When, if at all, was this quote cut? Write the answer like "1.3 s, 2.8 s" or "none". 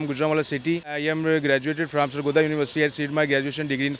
1.0 s